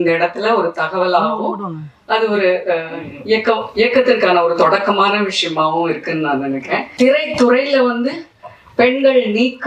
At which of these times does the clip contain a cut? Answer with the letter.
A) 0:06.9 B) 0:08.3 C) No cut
A